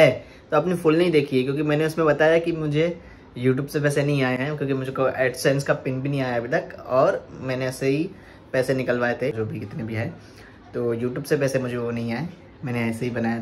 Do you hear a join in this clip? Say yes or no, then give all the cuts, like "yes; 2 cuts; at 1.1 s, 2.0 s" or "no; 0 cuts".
no; 0 cuts